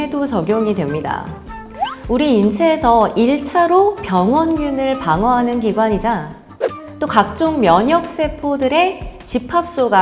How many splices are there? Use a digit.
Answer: 0